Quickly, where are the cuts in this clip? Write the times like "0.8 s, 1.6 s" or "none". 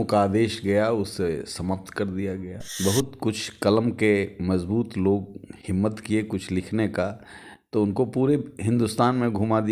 2.6 s